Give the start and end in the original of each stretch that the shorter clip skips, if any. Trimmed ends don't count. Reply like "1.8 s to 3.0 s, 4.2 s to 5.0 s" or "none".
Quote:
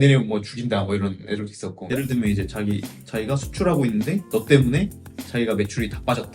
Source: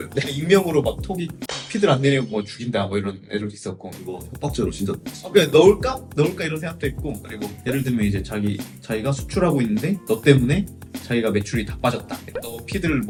3.8 s to 7.6 s